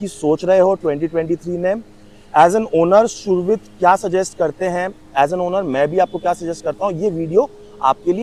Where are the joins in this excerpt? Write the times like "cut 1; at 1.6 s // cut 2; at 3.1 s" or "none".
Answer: none